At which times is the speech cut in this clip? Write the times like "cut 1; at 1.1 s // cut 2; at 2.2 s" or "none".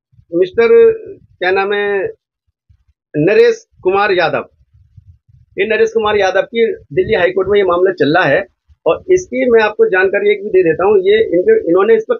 none